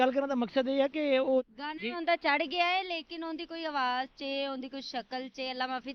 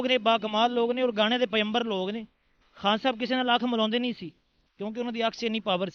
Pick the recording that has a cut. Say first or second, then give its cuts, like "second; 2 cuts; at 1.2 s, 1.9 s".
first; 1 cut; at 1.4 s